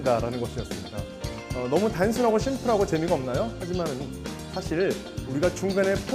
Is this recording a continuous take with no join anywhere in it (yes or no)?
no